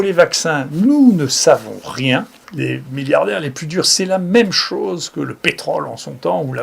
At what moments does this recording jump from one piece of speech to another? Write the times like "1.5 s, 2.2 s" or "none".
2.4 s